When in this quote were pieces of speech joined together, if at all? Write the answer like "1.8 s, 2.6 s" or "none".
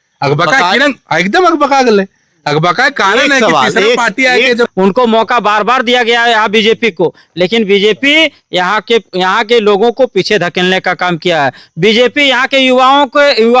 4.7 s